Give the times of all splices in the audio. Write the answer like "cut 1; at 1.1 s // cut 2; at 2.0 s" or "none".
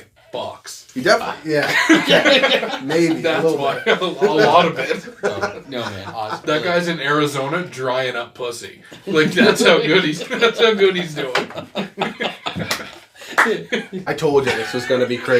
cut 1; at 14.0 s